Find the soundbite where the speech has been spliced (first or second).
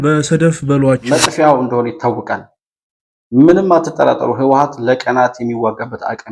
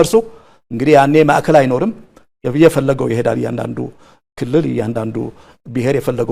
first